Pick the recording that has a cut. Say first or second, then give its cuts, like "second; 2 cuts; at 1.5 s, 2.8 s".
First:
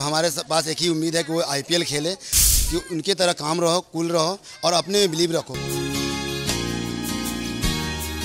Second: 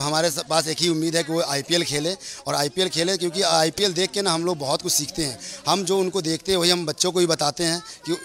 first; 2 cuts; at 2.4 s, 5.5 s